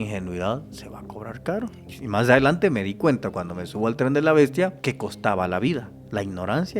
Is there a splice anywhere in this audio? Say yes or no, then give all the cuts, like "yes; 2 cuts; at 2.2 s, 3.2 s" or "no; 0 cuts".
yes; 2 cuts; at 1.9 s, 4.8 s